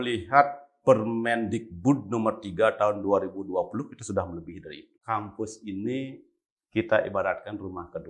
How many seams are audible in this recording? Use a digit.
1